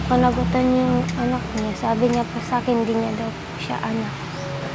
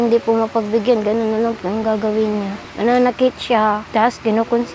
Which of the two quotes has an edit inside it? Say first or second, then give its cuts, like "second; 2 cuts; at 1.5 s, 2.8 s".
second; 2 cuts; at 2.6 s, 3.8 s